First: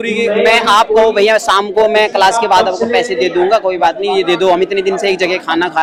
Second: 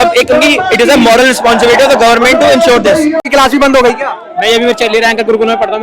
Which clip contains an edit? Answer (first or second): second